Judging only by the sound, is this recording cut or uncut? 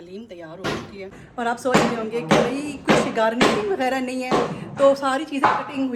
uncut